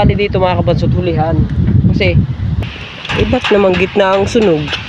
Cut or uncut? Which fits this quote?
cut